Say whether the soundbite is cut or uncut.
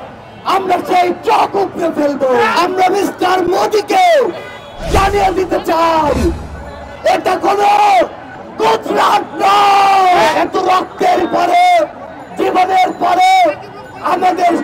cut